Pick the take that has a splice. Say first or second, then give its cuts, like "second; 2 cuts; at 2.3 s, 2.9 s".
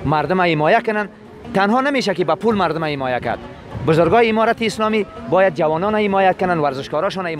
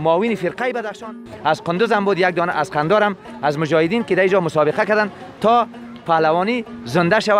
second; 1 cut; at 1.3 s